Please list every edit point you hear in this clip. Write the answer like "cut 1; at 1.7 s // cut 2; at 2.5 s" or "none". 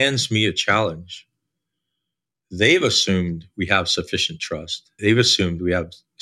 cut 1; at 4.8 s